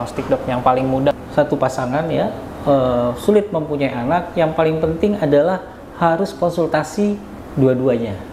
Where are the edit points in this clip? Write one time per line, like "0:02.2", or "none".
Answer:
0:01.1

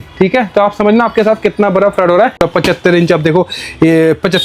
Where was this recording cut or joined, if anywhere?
0:02.4

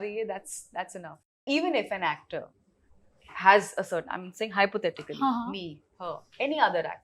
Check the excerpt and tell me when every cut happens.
0:01.4

